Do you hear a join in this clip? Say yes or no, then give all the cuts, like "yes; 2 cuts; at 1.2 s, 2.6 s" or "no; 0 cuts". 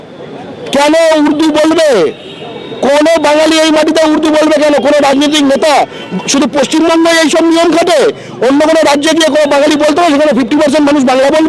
no; 0 cuts